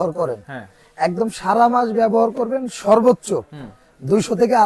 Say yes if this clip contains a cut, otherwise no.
no